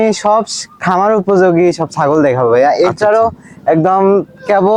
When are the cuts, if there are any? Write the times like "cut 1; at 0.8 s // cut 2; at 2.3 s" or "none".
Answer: none

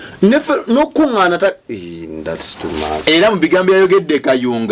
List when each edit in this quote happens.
none

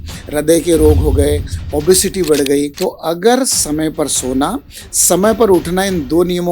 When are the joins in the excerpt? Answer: cut 1; at 2.7 s

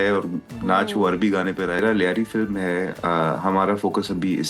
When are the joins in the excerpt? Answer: cut 1; at 1.8 s

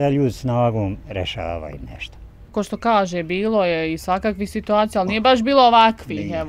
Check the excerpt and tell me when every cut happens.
cut 1; at 2.5 s

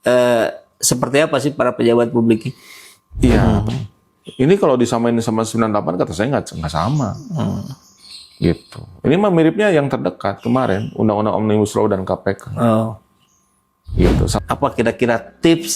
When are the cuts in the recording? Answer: cut 1; at 3.4 s // cut 2; at 14.4 s

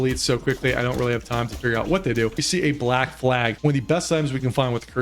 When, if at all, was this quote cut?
cut 1; at 2.4 s // cut 2; at 3.5 s

